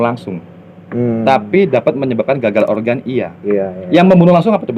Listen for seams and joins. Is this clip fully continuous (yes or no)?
yes